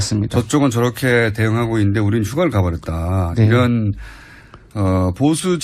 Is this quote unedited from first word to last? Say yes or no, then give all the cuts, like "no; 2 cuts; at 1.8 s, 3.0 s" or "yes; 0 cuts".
yes; 0 cuts